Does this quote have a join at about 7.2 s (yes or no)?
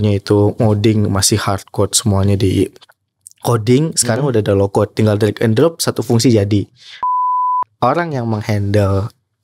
yes